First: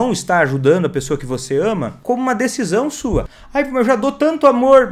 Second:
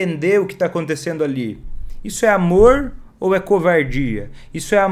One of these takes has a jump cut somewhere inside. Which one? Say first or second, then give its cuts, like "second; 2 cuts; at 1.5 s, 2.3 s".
first; 2 cuts; at 1.9 s, 3.4 s